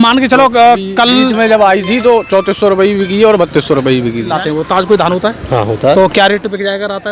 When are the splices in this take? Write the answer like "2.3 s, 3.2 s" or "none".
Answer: 4.3 s

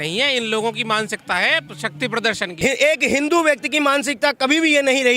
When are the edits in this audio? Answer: 2.5 s

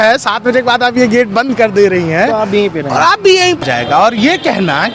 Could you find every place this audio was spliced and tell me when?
3.6 s

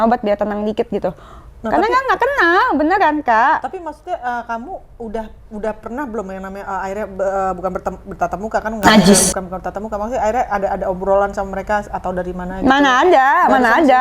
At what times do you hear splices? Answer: none

